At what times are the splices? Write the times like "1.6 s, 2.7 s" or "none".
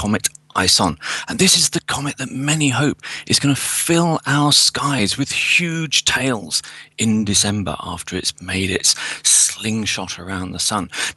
9.6 s